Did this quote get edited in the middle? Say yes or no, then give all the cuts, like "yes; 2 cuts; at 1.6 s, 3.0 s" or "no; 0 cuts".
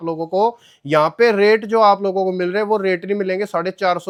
no; 0 cuts